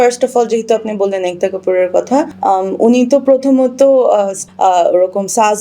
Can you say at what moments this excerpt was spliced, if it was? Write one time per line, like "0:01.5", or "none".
0:02.3
0:04.4

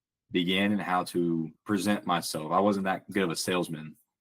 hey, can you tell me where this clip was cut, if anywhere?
0:01.5

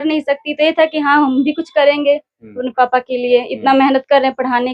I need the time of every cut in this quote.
none

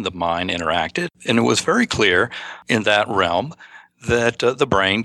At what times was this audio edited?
0:01.1
0:02.5

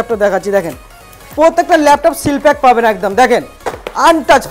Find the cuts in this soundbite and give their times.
none

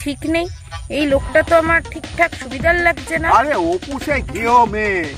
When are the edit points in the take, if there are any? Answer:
0:03.3

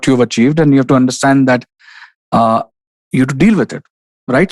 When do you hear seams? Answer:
none

